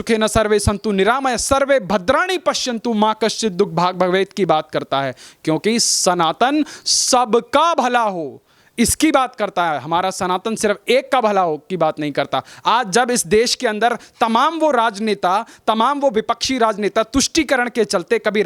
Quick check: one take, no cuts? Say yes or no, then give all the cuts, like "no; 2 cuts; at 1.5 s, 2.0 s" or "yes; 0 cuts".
yes; 0 cuts